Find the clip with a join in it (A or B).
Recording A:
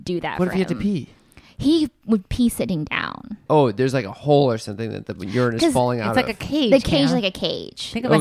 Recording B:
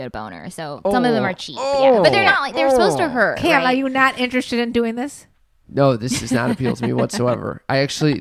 A